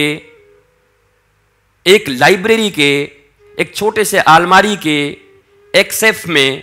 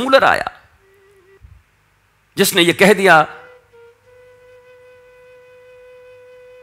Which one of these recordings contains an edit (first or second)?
second